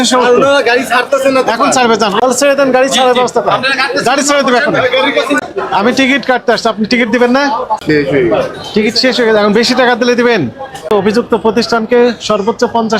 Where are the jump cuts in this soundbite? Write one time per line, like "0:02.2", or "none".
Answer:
0:02.2
0:05.4
0:07.8
0:10.9